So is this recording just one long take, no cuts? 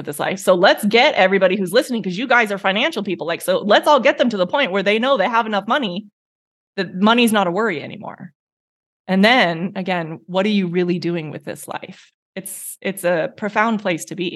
yes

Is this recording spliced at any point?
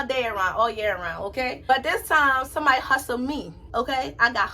yes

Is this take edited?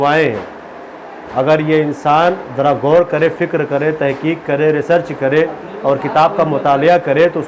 no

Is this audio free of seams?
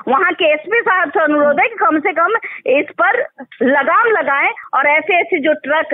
yes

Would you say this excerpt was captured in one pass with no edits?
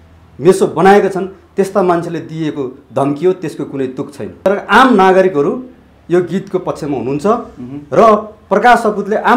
no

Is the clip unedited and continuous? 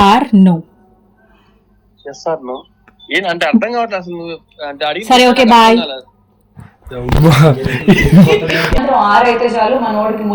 no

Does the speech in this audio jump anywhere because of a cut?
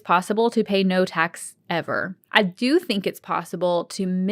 yes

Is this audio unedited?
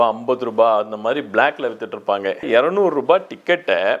no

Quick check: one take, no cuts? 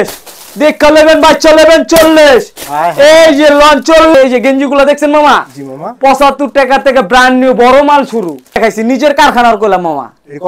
no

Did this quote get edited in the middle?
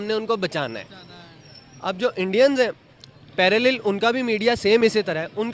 no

